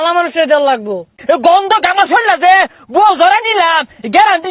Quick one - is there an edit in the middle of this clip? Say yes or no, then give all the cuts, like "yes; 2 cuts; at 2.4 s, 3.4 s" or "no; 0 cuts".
yes; 1 cut; at 1.1 s